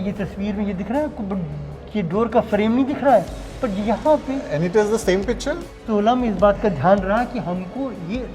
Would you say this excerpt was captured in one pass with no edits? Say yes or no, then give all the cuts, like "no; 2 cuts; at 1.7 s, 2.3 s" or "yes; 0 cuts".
no; 1 cut; at 5.7 s